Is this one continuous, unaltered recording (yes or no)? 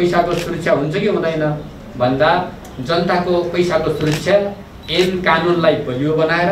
yes